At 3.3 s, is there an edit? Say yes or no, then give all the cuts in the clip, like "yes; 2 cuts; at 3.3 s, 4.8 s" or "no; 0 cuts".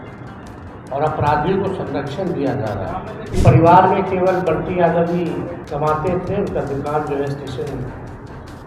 yes; 2 cuts; at 3.3 s, 5.6 s